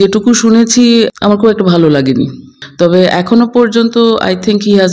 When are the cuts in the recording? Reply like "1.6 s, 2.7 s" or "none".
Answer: 1.1 s, 2.6 s